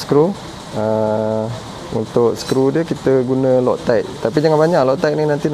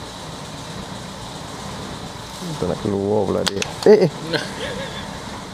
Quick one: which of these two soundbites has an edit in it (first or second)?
second